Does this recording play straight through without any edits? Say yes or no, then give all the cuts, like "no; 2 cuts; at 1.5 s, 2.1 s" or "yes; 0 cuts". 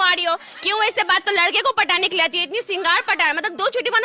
no; 1 cut; at 1.2 s